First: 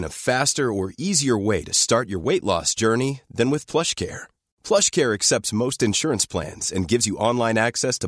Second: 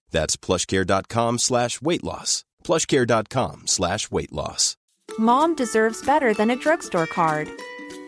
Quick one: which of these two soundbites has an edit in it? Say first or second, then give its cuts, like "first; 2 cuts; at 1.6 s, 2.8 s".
second; 1 cut; at 4.9 s